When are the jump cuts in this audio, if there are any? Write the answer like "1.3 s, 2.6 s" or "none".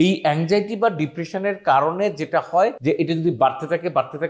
2.8 s